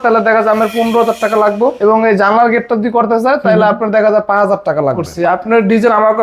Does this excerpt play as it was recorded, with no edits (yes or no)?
no